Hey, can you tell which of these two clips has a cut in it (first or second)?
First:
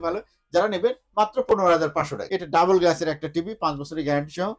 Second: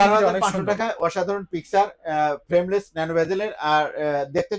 first